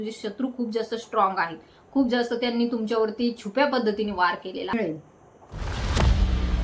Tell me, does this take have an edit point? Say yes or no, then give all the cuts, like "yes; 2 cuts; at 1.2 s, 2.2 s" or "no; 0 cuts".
yes; 1 cut; at 4.7 s